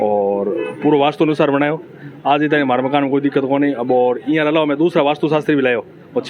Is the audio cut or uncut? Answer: uncut